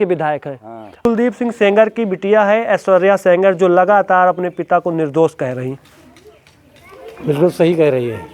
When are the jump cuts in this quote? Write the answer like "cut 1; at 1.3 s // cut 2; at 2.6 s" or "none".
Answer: cut 1; at 1.0 s